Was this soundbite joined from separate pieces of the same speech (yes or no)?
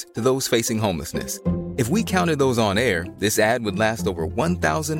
no